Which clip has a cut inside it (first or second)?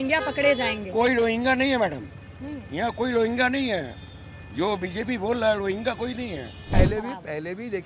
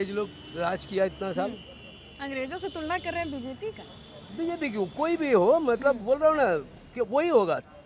first